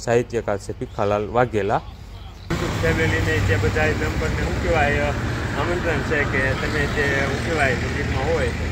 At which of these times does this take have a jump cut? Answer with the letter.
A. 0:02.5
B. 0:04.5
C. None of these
A